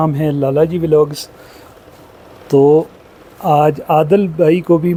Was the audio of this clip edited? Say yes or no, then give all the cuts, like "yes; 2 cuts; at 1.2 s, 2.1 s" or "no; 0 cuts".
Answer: no; 0 cuts